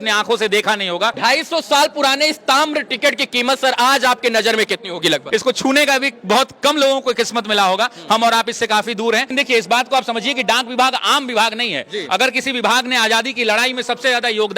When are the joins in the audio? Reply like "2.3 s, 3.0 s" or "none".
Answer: 1.2 s, 5.2 s, 9.3 s